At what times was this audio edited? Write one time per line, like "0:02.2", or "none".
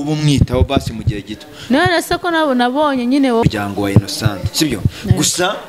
0:03.4